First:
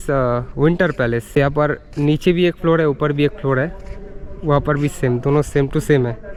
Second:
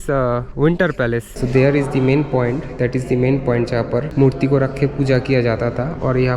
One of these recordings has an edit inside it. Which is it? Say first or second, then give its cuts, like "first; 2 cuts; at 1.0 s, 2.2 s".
second; 2 cuts; at 1.3 s, 4.1 s